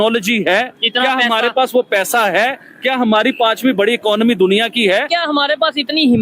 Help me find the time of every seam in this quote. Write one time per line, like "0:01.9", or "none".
0:05.1